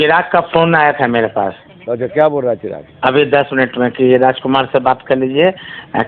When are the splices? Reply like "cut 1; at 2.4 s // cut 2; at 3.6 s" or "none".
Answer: none